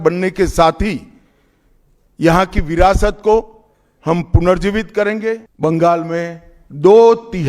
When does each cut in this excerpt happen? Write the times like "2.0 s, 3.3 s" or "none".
5.5 s